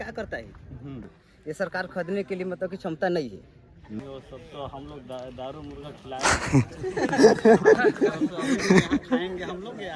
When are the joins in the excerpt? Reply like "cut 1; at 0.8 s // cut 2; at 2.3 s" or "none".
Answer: cut 1; at 1.2 s // cut 2; at 4.0 s